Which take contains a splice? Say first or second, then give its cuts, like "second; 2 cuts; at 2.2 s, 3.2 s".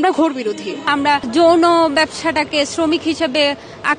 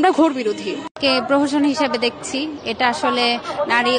first; 1 cut; at 0.9 s